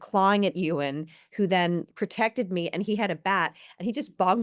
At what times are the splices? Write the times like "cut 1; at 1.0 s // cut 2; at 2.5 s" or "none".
cut 1; at 1.9 s